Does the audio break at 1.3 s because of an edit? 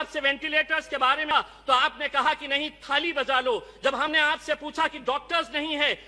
yes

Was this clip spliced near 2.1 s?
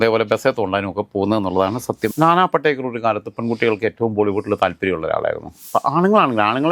yes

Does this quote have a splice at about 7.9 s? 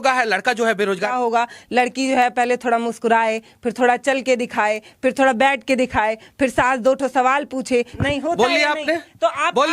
yes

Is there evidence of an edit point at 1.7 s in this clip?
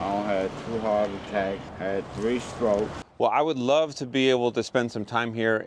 yes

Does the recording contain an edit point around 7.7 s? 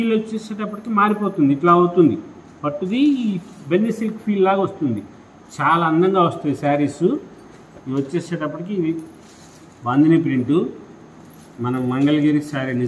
yes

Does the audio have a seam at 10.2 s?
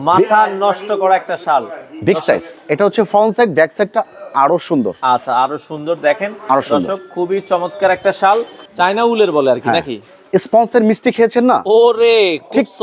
no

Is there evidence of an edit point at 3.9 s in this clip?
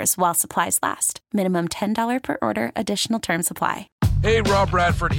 yes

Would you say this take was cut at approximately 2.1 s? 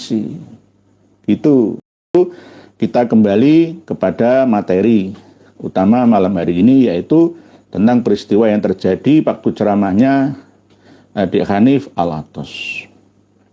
yes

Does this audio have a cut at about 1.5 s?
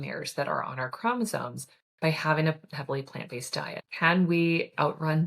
no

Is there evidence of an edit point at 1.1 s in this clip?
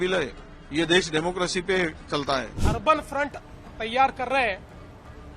no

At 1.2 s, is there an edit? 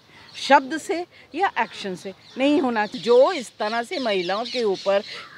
no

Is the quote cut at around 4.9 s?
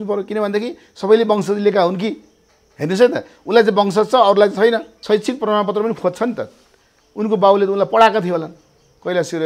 yes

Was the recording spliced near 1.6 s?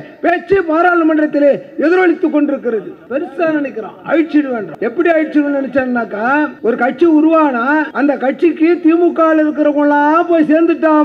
no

